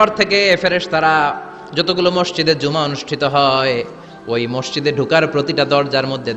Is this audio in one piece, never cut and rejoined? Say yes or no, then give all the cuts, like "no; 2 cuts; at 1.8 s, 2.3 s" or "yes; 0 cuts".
yes; 0 cuts